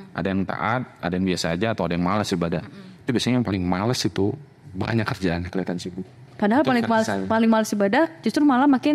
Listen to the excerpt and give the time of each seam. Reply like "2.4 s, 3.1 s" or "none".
none